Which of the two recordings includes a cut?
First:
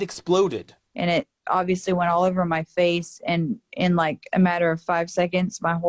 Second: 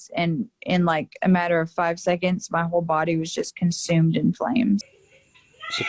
second; 1 cut; at 5.0 s

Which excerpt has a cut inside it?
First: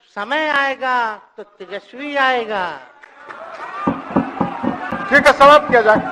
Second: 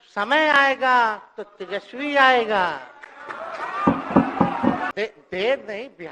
second; 1 cut; at 4.9 s

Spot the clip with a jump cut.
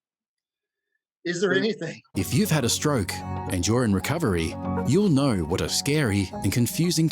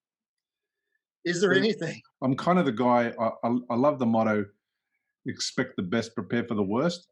second; 1 cut; at 2.0 s

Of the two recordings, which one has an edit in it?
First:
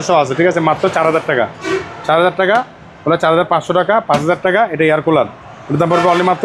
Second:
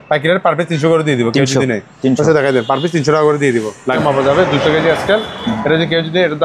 second; 1 cut; at 4.0 s

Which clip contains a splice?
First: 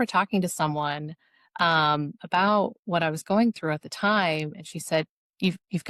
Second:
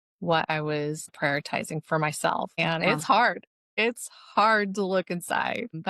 second; 2 cuts; at 1.1 s, 2.5 s

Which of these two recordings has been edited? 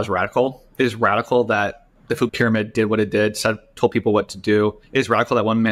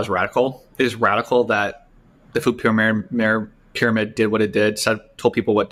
first; 2 cuts; at 2.1 s, 4.8 s

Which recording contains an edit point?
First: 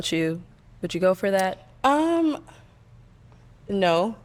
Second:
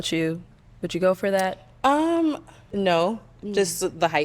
second; 1 cut; at 2.5 s

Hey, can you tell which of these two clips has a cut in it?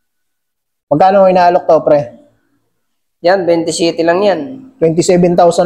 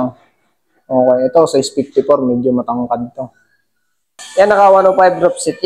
second; 1 cut; at 4.2 s

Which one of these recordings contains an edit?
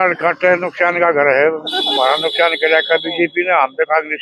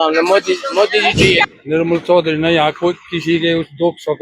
second; 1 cut; at 1.5 s

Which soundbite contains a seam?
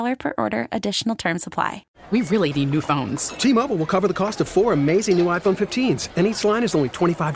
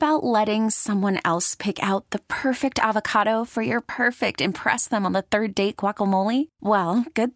first; 1 cut; at 1.8 s

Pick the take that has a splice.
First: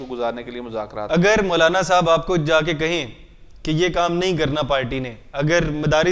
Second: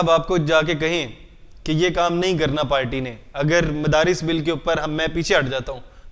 first; 1 cut; at 1.1 s

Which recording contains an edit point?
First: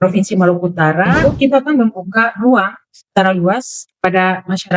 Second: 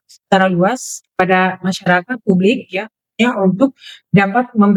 first; 1 cut; at 1.1 s

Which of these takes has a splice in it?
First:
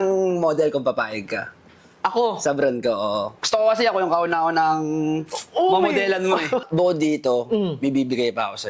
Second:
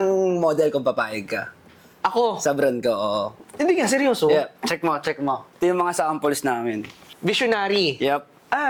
first; 2 cuts; at 3.3 s, 6.7 s

